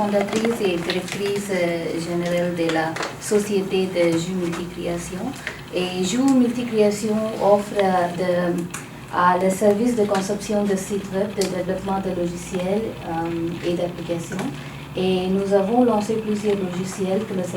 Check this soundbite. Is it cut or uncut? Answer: uncut